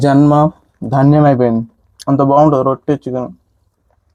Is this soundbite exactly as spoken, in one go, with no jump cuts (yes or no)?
yes